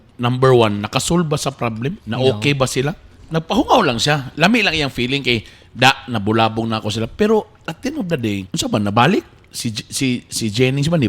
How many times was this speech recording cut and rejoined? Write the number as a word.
two